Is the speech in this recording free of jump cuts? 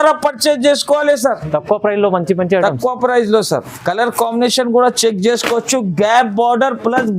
no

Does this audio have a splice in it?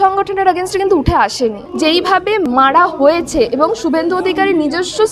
yes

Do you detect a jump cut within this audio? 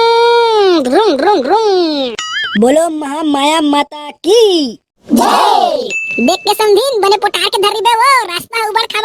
no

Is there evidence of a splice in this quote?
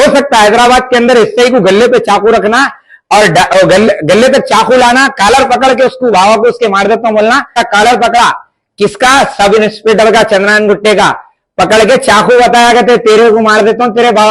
yes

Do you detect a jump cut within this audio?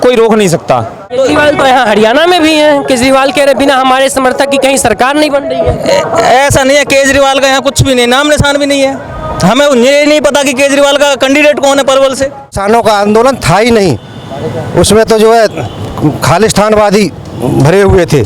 yes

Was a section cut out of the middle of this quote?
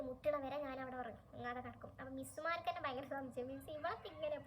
no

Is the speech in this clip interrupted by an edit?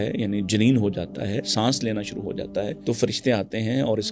yes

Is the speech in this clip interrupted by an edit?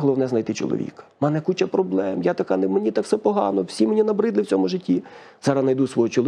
no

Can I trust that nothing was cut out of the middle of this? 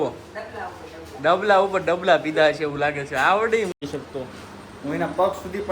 no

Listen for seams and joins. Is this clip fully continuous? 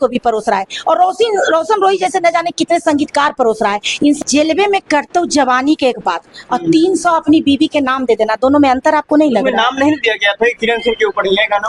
no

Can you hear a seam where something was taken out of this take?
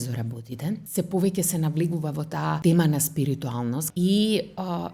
yes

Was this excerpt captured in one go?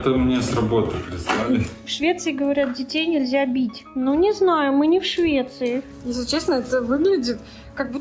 no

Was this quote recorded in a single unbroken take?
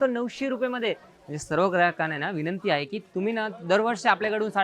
yes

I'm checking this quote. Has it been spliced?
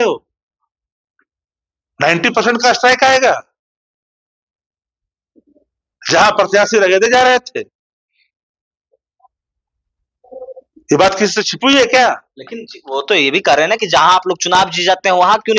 no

